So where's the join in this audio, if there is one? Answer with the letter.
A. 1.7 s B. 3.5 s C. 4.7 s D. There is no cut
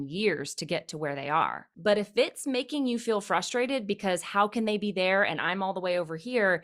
A